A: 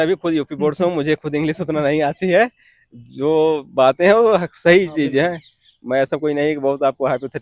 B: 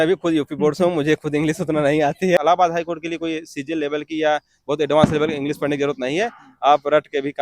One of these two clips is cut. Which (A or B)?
B